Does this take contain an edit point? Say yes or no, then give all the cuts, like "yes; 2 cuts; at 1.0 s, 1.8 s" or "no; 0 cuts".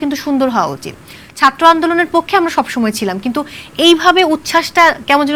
no; 0 cuts